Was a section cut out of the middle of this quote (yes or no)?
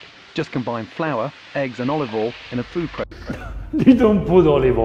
no